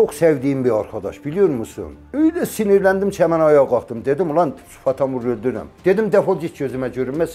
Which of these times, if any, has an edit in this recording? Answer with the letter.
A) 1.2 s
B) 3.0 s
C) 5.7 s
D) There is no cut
C